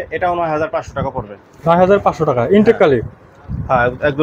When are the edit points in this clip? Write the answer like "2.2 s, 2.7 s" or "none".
none